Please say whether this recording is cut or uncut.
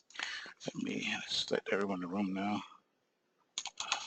uncut